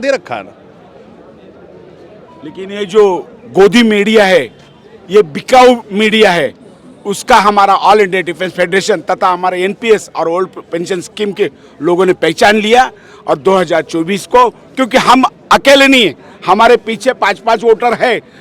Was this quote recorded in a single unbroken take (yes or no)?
yes